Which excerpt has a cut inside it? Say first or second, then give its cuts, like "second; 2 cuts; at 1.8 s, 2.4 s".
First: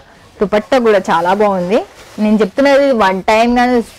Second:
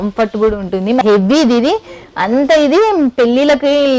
second; 1 cut; at 1.0 s